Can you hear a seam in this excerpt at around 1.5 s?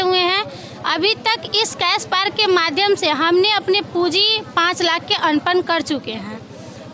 no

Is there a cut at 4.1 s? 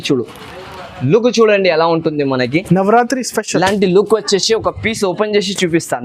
no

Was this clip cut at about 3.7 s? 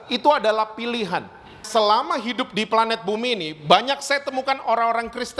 no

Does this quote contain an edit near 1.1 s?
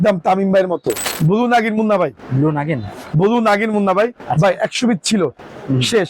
yes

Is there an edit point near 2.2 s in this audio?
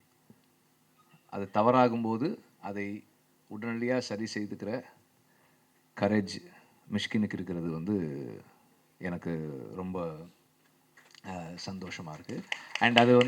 no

